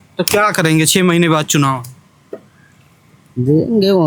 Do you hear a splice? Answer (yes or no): no